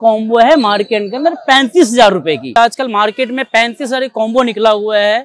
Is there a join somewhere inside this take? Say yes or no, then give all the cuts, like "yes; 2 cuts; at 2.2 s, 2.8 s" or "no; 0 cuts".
yes; 1 cut; at 2.5 s